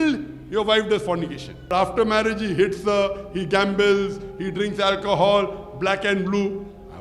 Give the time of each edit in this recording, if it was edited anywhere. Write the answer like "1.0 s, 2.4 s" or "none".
1.7 s

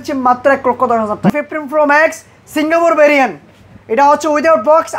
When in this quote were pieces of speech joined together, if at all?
1.3 s

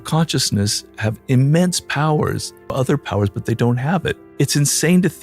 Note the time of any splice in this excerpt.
2.7 s, 4.2 s

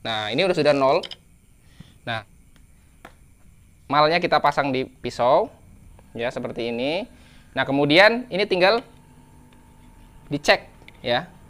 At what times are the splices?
2.3 s

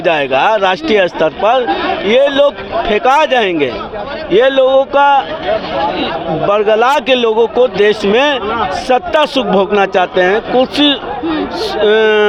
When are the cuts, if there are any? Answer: none

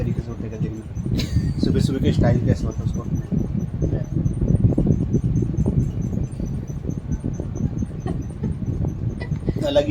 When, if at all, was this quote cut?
none

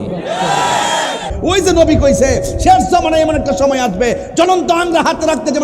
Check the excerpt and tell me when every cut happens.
1.3 s

